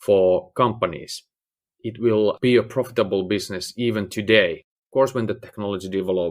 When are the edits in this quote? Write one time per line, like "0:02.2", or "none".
0:02.4